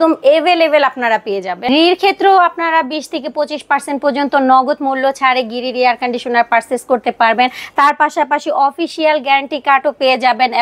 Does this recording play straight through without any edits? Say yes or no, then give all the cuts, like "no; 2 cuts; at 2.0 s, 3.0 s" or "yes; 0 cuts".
no; 1 cut; at 1.6 s